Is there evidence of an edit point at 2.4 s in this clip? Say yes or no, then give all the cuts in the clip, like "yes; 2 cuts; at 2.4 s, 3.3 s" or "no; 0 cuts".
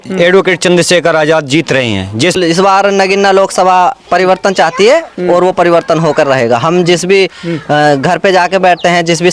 yes; 1 cut; at 2.4 s